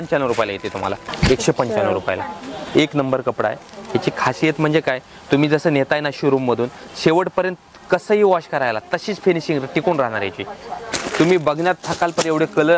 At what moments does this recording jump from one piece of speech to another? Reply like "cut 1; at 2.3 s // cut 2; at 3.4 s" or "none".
cut 1; at 1.0 s // cut 2; at 11.0 s